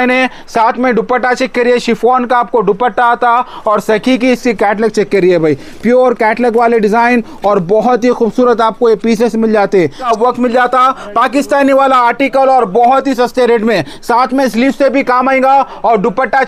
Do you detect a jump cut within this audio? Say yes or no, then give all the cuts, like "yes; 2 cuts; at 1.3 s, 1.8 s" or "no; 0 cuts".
yes; 1 cut; at 10.0 s